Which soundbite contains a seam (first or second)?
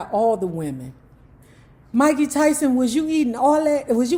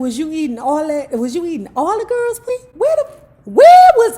second